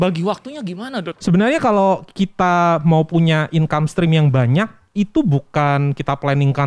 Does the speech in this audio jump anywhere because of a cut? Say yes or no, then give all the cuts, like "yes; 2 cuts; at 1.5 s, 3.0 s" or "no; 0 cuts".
yes; 1 cut; at 1.1 s